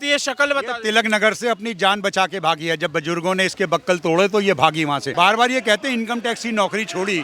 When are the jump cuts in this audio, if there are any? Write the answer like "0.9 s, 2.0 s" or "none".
5.1 s

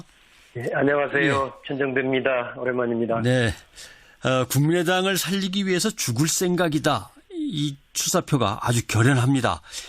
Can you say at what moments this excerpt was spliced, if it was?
8.4 s

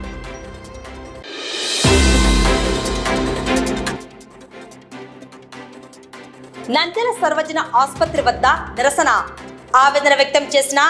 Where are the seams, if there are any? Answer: 1.2 s, 4.0 s, 6.7 s

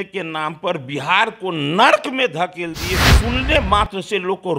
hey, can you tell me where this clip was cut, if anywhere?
3.1 s

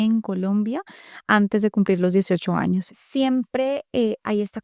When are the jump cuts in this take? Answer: 2.9 s

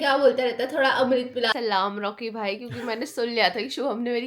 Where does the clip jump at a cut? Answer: 1.5 s

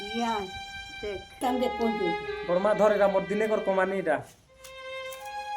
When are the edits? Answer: 1.4 s

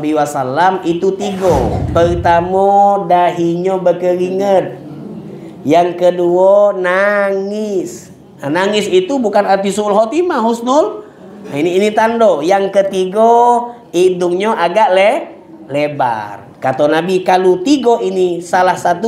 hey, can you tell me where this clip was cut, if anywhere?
1.8 s

